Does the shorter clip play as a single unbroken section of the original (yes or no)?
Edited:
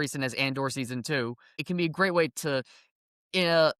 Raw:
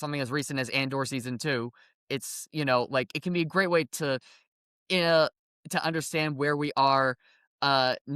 no